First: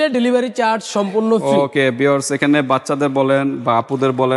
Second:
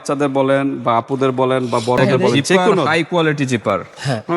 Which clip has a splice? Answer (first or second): second